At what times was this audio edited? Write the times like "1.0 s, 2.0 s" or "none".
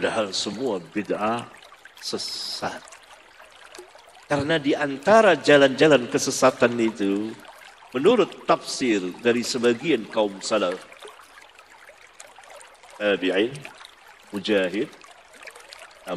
2.8 s, 4.2 s